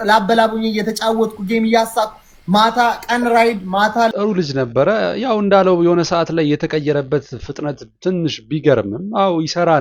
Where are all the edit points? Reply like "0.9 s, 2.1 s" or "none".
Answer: none